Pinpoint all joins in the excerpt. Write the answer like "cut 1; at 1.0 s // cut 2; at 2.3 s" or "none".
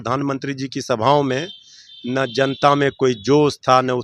none